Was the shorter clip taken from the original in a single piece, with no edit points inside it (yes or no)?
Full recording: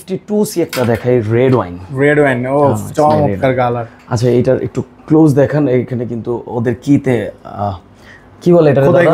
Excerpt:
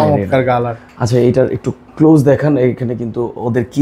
yes